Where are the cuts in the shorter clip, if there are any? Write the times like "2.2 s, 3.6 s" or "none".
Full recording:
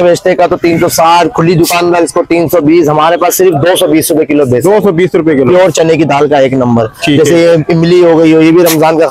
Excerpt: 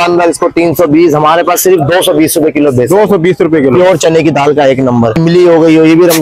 5.2 s